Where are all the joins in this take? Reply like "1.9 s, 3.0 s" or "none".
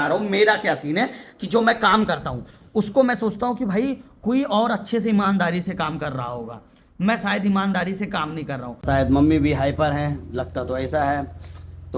8.8 s, 10.6 s